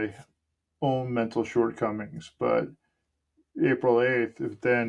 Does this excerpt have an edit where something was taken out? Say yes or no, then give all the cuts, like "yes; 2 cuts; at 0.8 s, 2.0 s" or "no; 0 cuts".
no; 0 cuts